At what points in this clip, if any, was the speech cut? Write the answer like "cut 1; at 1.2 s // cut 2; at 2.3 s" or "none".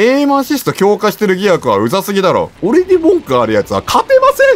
cut 1; at 2.5 s